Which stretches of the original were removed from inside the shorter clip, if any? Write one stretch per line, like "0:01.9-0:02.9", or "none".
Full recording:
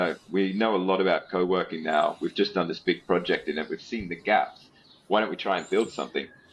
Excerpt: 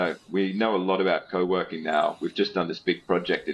none